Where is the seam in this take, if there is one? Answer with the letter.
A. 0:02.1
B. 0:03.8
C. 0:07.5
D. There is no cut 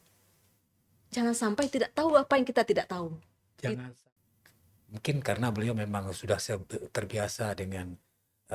B